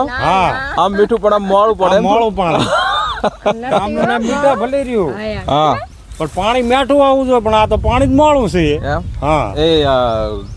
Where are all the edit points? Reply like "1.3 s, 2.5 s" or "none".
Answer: none